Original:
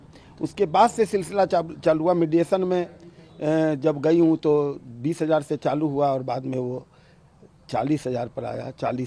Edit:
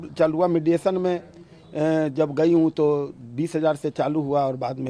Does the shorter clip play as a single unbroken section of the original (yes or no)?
yes